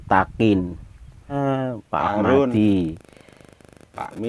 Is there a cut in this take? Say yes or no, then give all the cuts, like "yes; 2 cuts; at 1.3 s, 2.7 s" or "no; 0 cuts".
yes; 1 cut; at 1.4 s